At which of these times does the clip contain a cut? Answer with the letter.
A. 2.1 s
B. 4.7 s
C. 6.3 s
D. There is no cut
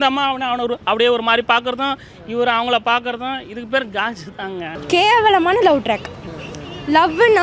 B